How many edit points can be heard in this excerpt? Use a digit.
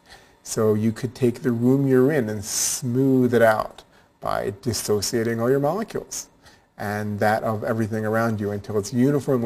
0